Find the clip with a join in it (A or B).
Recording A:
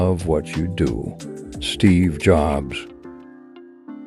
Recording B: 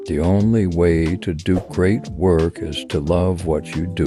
A